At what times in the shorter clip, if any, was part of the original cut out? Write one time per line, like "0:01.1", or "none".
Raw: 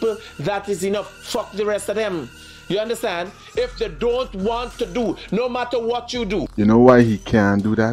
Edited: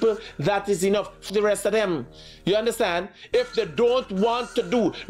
0:01.2